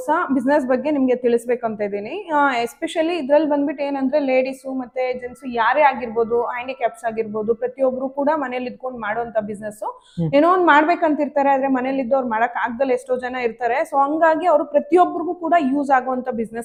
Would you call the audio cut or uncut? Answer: uncut